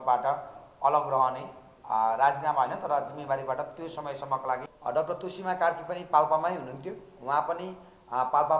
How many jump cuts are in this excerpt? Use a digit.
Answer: 1